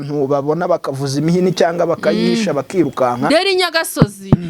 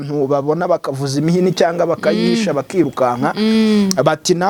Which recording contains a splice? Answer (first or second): first